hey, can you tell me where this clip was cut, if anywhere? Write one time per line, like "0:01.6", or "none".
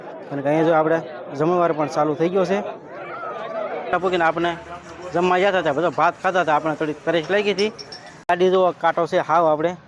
0:03.9
0:08.3

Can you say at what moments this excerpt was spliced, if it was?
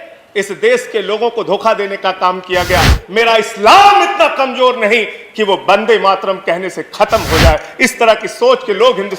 0:03.0

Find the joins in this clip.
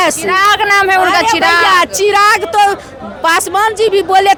none

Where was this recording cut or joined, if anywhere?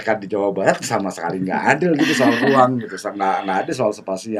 none

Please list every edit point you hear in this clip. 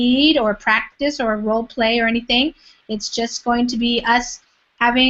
none

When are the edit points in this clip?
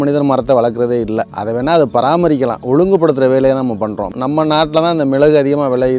0:01.4
0:04.1

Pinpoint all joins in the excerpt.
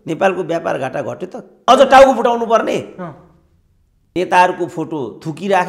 0:01.6
0:04.1

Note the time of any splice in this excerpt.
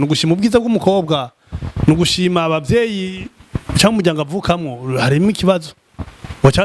none

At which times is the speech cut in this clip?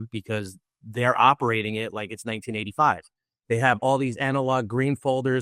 0:03.3

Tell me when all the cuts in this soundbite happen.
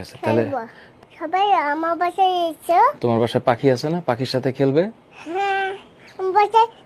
0:00.9

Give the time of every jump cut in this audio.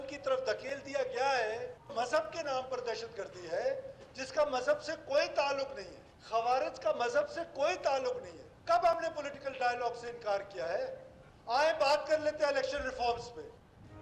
none

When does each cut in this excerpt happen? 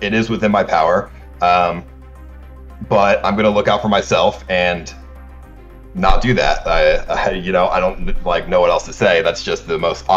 none

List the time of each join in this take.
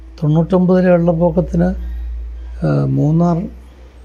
none

